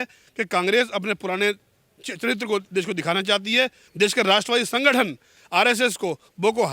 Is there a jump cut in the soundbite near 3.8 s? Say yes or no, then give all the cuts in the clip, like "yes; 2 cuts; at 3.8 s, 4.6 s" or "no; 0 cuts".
yes; 1 cut; at 3.8 s